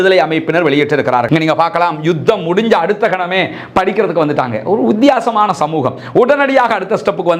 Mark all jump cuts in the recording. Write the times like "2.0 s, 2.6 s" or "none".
1.3 s